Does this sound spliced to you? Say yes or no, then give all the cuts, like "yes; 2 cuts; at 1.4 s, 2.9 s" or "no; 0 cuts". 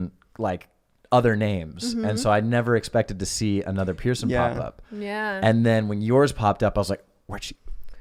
no; 0 cuts